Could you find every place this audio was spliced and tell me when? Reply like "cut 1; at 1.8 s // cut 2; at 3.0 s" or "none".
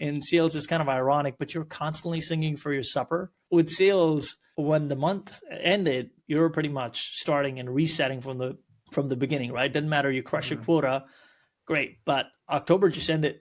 cut 1; at 3.3 s